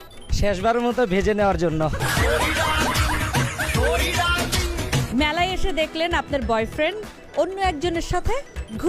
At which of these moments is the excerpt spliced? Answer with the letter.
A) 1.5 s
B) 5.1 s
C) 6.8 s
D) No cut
B